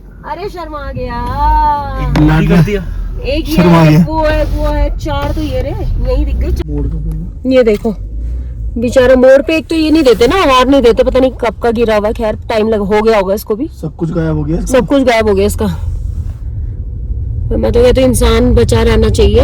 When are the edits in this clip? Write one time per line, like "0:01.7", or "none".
none